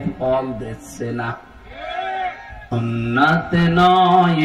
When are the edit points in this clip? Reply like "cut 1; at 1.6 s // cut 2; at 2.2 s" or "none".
cut 1; at 2.7 s